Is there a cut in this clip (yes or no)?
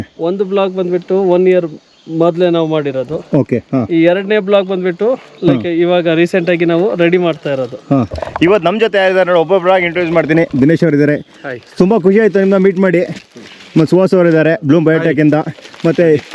no